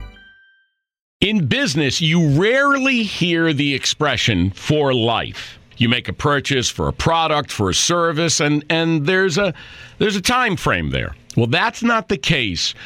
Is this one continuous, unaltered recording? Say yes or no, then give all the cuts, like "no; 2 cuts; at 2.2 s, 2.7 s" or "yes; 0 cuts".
no; 1 cut; at 1.2 s